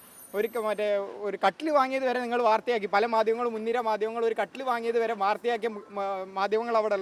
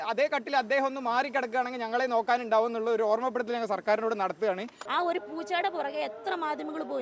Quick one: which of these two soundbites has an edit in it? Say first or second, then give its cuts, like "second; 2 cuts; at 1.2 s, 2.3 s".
second; 1 cut; at 4.8 s